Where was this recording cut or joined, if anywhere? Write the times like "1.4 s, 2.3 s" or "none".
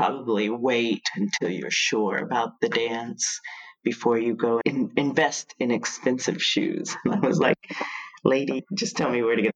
8.6 s